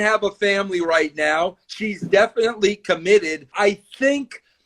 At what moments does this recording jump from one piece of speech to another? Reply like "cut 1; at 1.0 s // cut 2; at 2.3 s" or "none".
cut 1; at 3.5 s

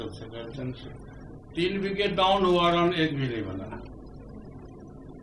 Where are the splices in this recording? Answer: none

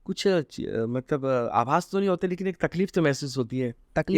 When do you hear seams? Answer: none

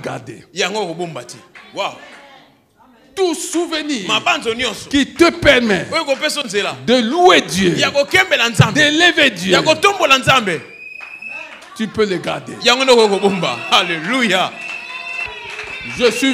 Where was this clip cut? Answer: cut 1; at 15.3 s

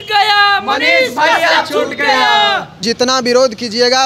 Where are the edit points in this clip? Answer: cut 1; at 2.8 s

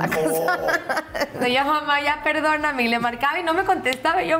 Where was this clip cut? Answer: cut 1; at 1.4 s

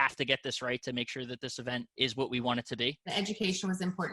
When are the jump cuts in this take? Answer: cut 1; at 1.9 s // cut 2; at 3.1 s

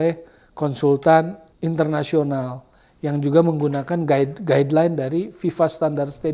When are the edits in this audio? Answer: cut 1; at 1.5 s

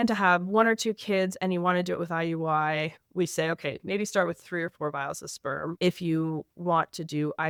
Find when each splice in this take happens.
none

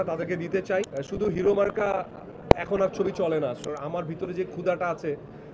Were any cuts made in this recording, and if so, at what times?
cut 1; at 0.9 s // cut 2; at 3.7 s

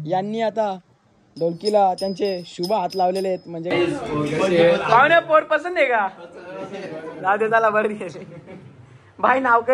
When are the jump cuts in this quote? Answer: cut 1; at 3.7 s

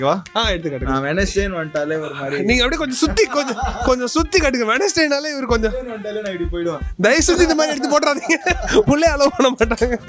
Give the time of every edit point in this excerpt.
none

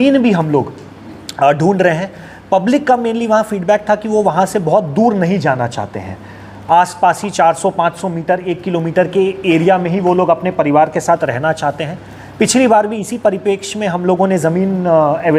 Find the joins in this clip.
none

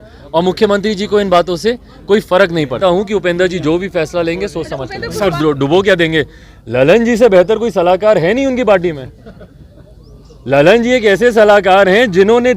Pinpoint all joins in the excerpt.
cut 1; at 2.8 s // cut 2; at 5.3 s

